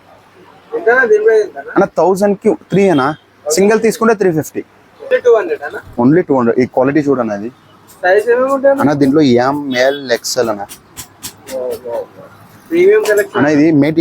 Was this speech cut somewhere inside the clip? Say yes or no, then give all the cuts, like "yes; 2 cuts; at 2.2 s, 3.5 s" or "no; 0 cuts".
yes; 1 cut; at 5.1 s